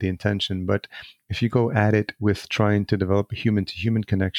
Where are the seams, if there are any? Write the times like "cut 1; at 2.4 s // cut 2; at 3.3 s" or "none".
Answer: none